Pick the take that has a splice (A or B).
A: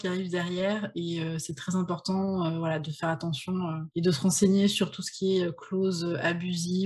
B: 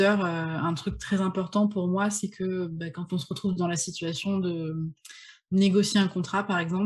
A